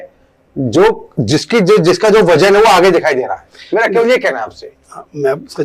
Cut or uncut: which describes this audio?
uncut